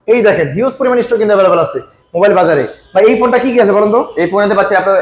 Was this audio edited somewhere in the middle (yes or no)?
no